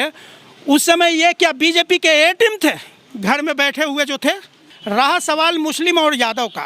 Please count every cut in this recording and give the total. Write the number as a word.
one